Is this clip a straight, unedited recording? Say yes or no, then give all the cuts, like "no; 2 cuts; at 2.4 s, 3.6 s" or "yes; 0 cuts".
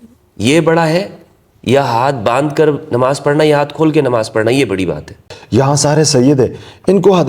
no; 1 cut; at 5.3 s